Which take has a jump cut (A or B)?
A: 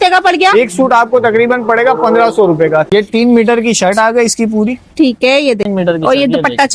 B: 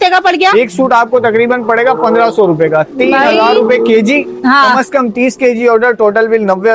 A